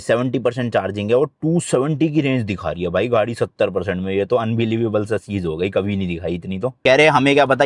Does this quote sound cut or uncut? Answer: cut